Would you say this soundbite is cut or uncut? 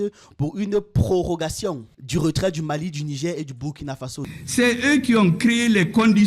cut